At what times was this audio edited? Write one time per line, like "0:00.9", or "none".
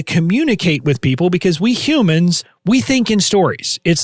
0:02.5